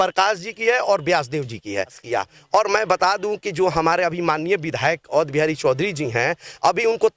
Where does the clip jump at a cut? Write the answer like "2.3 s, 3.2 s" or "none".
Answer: 2.0 s